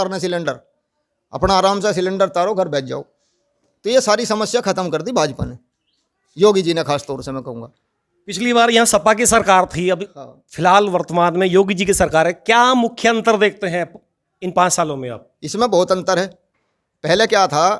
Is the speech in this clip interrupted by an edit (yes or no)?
no